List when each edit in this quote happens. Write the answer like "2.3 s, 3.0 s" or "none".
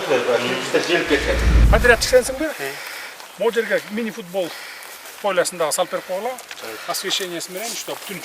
1.5 s